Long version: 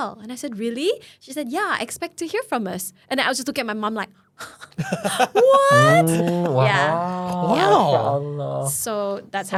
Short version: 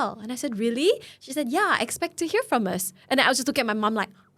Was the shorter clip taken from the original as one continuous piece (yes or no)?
yes